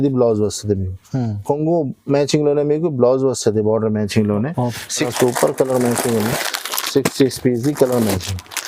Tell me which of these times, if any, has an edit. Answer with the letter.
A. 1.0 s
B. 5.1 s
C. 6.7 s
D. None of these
B